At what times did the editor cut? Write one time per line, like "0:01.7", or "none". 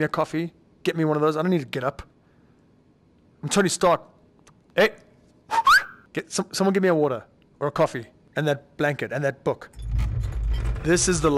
0:04.6
0:05.9
0:09.7